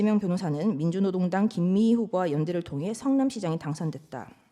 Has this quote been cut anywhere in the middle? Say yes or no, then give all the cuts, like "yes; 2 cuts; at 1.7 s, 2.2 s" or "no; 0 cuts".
no; 0 cuts